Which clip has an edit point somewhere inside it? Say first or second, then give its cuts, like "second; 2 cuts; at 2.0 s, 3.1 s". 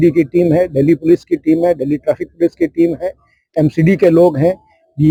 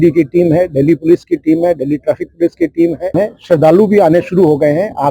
second; 1 cut; at 3.1 s